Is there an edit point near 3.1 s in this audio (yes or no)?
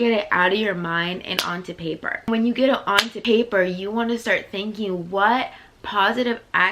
yes